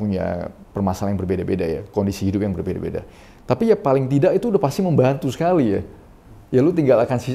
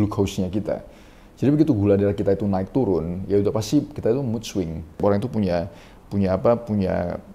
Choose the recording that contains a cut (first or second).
second